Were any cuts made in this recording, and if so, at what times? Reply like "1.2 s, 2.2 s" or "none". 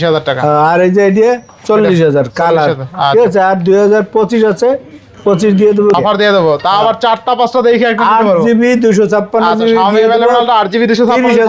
6.0 s